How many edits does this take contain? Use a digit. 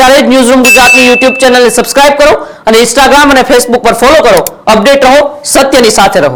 0